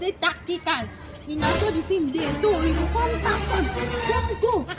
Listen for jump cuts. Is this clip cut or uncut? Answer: uncut